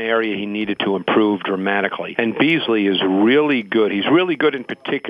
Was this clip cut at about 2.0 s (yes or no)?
yes